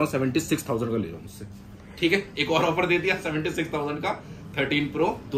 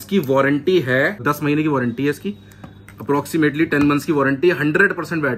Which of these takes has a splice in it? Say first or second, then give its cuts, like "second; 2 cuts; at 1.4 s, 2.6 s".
second; 1 cut; at 1.2 s